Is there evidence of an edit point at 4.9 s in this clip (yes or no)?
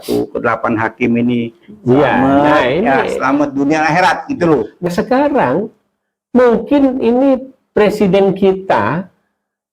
yes